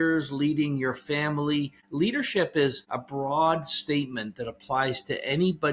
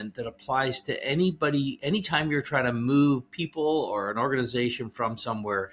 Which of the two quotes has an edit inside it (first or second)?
first